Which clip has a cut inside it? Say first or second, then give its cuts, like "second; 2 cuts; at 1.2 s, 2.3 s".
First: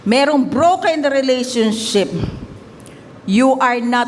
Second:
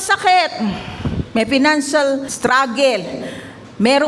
second; 1 cut; at 2.3 s